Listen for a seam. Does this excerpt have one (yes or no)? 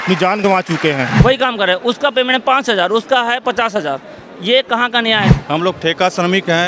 yes